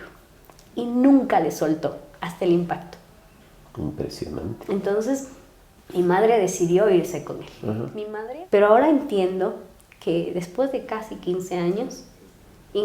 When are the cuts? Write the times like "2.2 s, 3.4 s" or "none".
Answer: 8.0 s